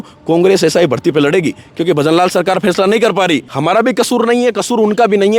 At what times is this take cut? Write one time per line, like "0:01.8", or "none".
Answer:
0:03.5

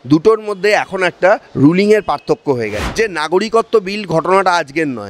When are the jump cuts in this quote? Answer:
0:02.8

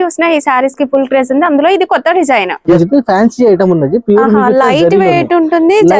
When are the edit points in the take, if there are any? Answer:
0:02.7

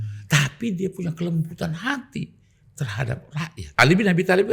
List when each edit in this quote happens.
0:03.6

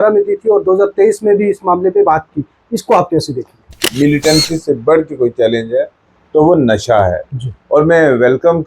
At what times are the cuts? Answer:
0:03.7

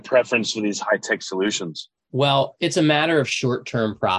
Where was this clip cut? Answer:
0:02.5

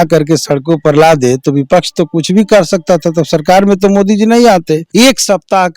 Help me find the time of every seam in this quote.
0:04.9

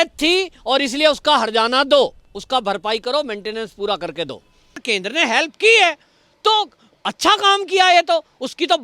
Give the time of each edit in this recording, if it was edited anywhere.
0:04.8

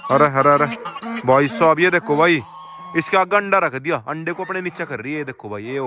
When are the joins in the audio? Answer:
none

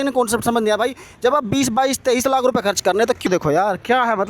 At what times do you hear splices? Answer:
0:03.3

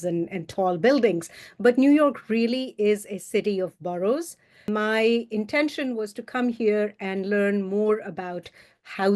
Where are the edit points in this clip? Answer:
0:04.5

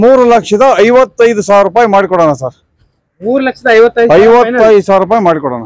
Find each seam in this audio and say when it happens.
none

